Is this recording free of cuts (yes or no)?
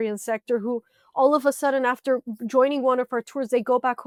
yes